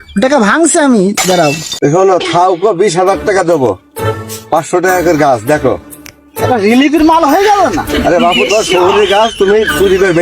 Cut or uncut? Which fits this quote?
cut